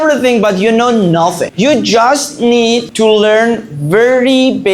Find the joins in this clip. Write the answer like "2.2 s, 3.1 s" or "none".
1.5 s